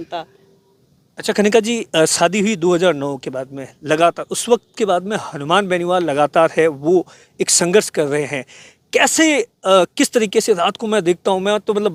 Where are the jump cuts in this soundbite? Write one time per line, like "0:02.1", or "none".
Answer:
none